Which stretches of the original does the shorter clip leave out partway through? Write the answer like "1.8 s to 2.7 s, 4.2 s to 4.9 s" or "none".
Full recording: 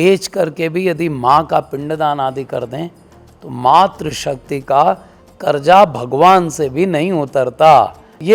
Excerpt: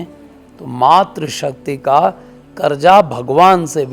none